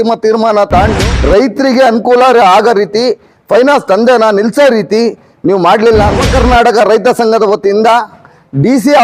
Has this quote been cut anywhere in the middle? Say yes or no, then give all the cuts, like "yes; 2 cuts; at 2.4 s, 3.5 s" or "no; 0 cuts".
yes; 2 cuts; at 1.0 s, 6.2 s